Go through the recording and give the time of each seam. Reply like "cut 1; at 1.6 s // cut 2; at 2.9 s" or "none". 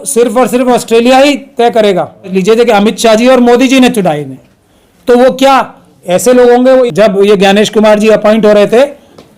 cut 1; at 2.4 s // cut 2; at 6.9 s